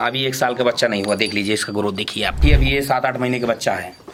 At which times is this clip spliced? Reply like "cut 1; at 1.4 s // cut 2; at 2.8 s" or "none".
none